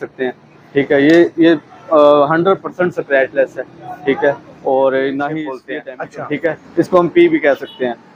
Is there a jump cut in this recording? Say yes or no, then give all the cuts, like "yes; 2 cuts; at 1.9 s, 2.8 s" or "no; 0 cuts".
yes; 1 cut; at 5.8 s